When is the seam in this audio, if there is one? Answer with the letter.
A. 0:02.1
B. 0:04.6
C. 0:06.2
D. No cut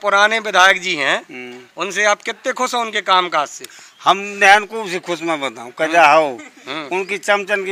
D